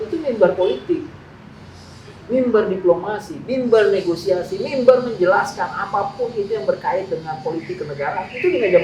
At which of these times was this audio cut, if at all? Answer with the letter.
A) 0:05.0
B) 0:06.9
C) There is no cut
C